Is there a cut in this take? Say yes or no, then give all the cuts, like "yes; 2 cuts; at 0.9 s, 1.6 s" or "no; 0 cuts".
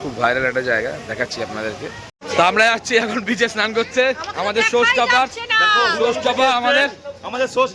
yes; 1 cut; at 2.1 s